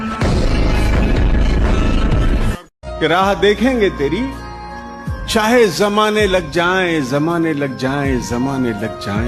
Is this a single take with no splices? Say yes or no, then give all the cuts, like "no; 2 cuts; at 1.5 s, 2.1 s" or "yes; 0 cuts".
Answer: yes; 0 cuts